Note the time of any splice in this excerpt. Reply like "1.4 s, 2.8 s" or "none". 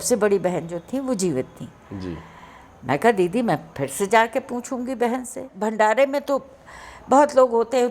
5.5 s